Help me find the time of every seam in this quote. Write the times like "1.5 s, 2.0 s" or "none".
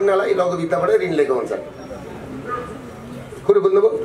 none